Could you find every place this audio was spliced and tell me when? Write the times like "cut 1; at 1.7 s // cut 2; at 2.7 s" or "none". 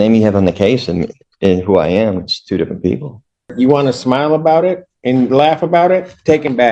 cut 1; at 3.5 s

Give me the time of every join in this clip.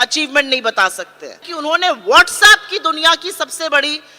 cut 1; at 1.5 s

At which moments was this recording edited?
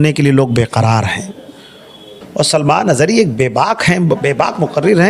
cut 1; at 2.1 s

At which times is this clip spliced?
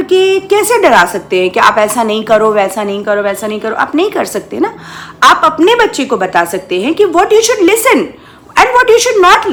none

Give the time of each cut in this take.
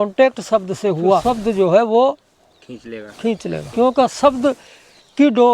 cut 1; at 1.2 s // cut 2; at 3.7 s

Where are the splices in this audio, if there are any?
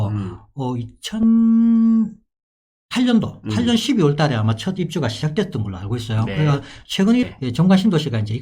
cut 1; at 7.3 s

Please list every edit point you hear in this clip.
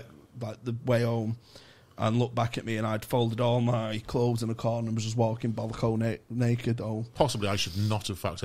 cut 1; at 7.1 s

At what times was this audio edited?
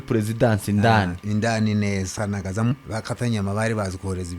cut 1; at 2.7 s

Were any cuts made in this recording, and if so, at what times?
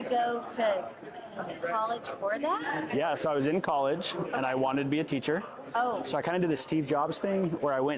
none

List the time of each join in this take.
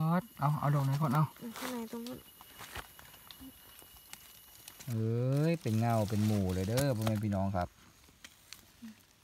cut 1; at 4.8 s

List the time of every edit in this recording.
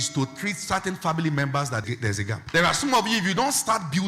cut 1; at 1.8 s

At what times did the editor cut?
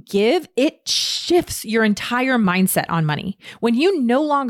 cut 1; at 2.4 s

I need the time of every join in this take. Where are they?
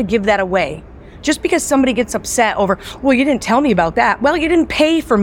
none

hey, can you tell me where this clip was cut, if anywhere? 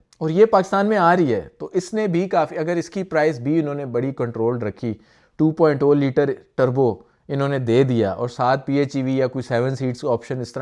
none

